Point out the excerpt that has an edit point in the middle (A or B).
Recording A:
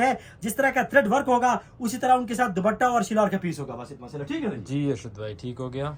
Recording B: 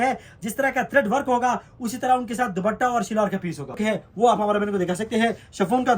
B